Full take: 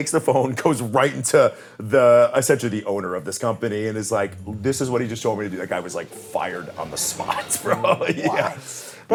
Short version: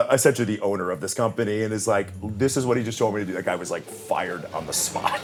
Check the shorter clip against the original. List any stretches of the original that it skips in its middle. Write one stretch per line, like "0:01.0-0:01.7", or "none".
none